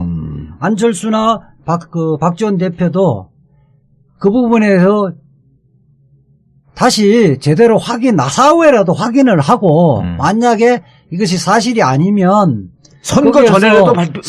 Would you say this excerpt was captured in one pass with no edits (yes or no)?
no